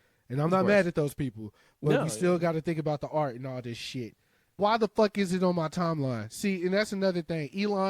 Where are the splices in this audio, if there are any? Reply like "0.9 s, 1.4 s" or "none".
4.6 s

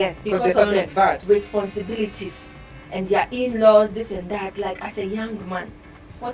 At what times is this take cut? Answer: none

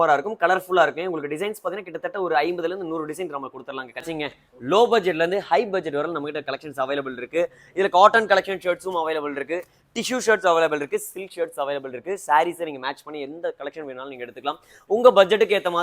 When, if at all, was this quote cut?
4.0 s

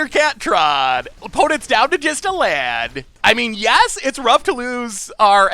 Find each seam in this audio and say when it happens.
1.1 s, 3.1 s

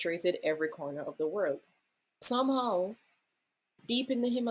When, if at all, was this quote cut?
2.2 s

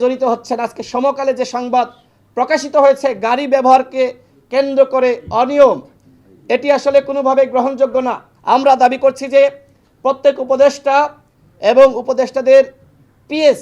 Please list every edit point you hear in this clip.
8.3 s

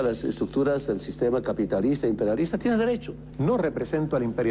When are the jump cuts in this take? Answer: 3.2 s

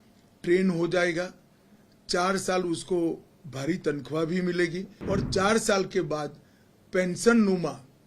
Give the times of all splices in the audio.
4.9 s

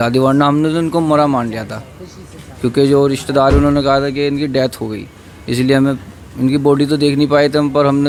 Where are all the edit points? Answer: none

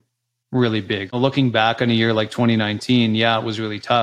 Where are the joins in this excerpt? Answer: 1.1 s

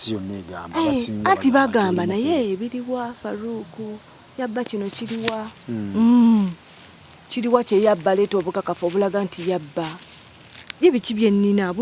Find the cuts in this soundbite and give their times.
5.6 s

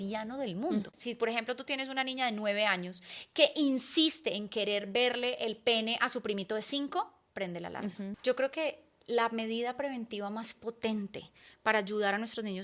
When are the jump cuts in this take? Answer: 0.9 s, 8.1 s

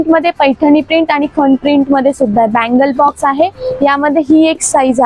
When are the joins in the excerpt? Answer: none

